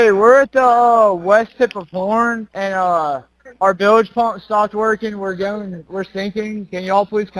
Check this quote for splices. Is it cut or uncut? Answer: uncut